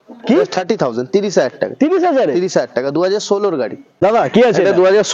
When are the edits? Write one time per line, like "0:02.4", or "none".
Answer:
0:03.9

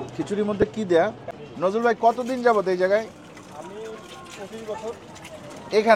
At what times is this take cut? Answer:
0:01.2

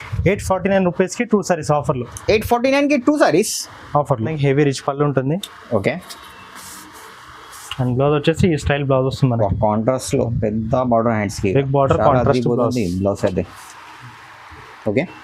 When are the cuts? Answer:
0:04.4

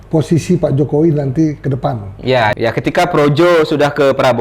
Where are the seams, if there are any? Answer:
0:02.5

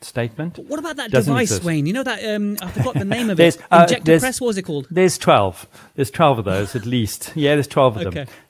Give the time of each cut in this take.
none

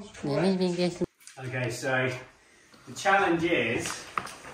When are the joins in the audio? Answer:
0:01.0

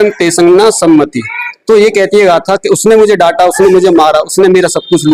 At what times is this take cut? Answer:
none

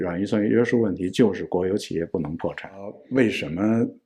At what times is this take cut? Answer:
0:03.0

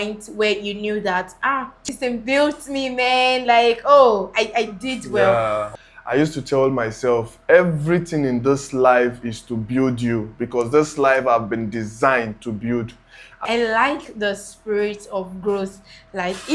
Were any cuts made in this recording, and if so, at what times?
0:01.9
0:05.7
0:13.4

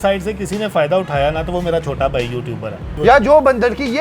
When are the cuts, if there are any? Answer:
0:02.9

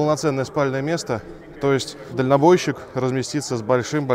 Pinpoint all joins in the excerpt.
0:02.0

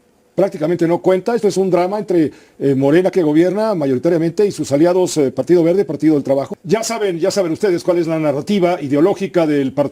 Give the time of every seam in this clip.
0:06.5

